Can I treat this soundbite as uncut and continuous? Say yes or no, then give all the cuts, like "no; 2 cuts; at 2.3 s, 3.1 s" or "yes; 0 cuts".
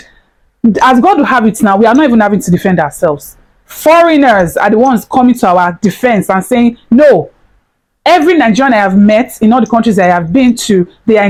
yes; 0 cuts